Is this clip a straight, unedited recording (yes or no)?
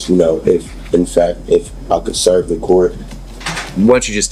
yes